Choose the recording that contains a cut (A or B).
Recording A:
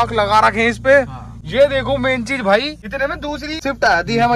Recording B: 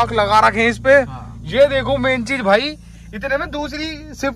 A